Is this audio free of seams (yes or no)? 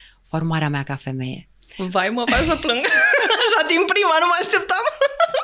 yes